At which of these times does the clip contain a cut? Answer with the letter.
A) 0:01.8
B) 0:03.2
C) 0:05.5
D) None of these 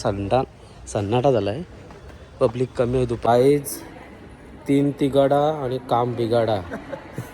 B